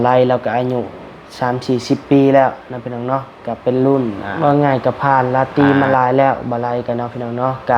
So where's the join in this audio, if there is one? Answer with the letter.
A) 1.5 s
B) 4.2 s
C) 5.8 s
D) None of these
B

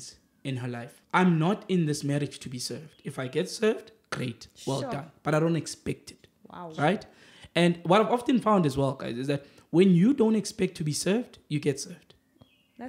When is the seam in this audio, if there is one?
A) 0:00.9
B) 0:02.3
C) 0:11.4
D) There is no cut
A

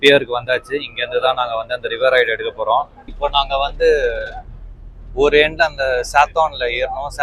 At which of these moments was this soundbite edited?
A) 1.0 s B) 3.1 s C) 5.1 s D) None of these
B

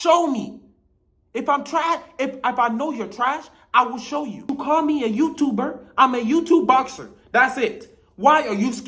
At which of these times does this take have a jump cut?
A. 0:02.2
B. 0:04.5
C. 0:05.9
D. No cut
B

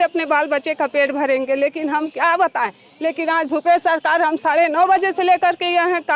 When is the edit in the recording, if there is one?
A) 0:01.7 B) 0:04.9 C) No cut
C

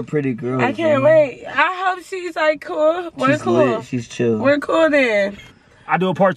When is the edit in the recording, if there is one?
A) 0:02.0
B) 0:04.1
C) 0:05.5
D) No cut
C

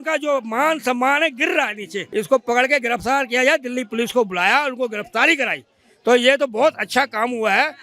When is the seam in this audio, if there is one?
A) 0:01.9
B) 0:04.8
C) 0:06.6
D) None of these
A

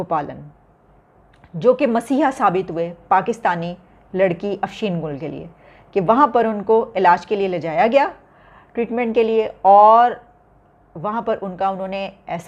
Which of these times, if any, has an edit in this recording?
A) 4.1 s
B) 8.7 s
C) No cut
C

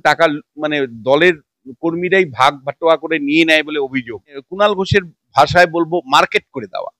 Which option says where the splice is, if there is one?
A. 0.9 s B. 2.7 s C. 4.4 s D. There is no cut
C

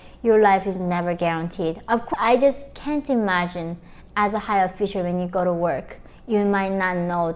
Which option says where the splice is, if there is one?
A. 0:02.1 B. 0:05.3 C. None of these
A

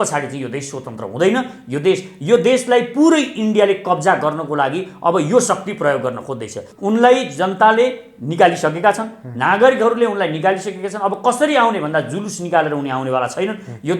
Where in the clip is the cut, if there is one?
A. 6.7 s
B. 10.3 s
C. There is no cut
A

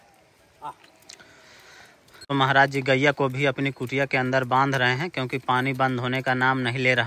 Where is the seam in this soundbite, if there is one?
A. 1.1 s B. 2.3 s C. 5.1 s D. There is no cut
B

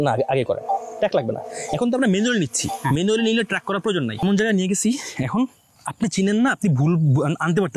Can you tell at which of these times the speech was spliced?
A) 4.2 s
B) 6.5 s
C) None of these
A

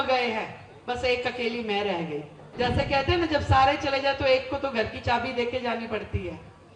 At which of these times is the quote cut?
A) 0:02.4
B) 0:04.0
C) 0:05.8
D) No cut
A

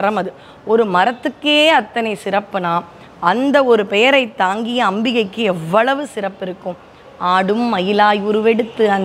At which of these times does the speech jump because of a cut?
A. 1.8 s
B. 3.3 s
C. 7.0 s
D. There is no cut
D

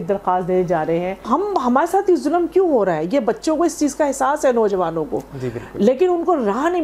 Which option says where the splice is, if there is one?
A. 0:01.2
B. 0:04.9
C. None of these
A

